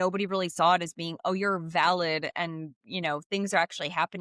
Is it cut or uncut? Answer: uncut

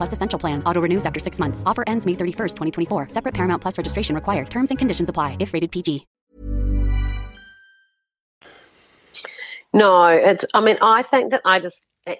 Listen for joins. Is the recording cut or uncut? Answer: uncut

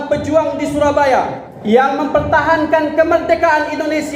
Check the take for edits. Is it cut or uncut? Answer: cut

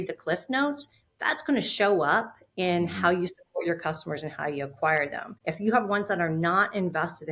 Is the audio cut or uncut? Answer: cut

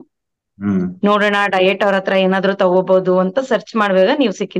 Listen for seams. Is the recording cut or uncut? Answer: uncut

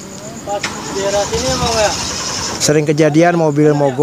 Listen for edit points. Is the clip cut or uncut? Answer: uncut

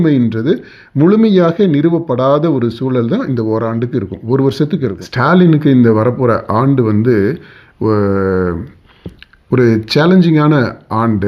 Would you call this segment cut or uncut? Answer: cut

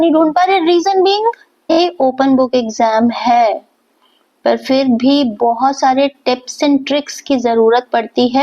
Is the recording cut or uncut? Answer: cut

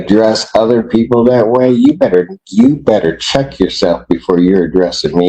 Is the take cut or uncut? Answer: uncut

